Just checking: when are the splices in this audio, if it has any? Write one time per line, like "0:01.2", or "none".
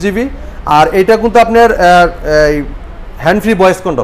none